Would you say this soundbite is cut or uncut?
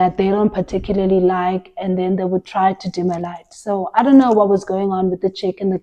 uncut